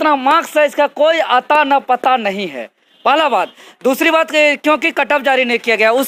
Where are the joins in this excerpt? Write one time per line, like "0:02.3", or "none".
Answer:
none